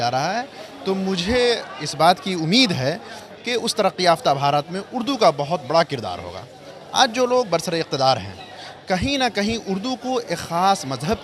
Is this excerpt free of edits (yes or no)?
yes